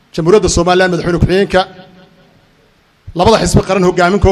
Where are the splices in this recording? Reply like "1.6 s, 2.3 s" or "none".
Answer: none